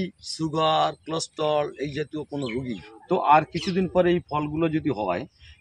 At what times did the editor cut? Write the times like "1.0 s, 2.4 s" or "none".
2.8 s